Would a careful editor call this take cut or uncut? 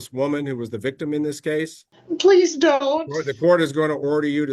cut